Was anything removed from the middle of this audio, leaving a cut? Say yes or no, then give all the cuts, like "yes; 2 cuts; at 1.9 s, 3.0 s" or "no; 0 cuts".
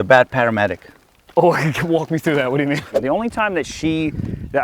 yes; 1 cut; at 2.9 s